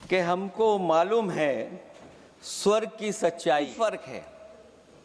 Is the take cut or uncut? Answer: cut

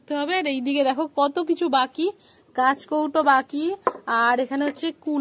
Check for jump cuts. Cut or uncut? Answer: uncut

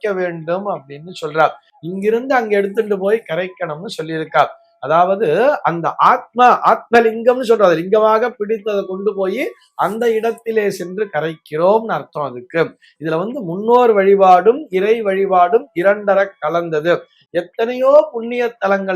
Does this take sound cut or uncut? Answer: uncut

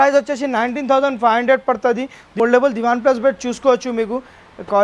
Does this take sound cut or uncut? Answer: cut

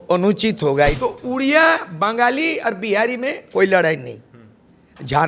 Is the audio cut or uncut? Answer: cut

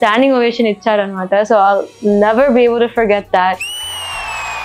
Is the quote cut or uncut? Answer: uncut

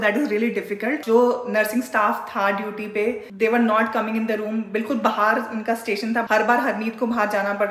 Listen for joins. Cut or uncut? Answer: cut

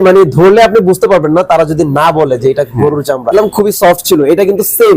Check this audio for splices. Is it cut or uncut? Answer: cut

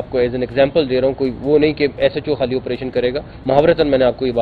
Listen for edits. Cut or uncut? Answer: cut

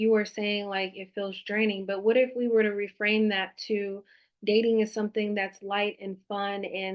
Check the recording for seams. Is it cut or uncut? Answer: uncut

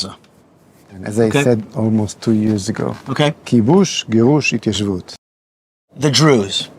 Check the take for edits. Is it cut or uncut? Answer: cut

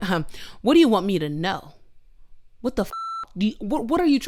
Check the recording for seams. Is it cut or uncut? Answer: uncut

